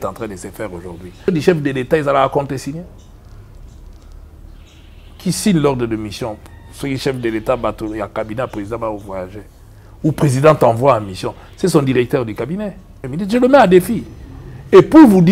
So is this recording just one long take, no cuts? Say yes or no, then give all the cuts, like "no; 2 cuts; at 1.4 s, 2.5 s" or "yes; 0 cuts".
no; 2 cuts; at 1.3 s, 13.0 s